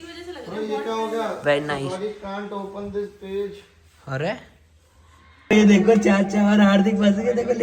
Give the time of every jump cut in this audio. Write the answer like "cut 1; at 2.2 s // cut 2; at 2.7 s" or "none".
cut 1; at 5.3 s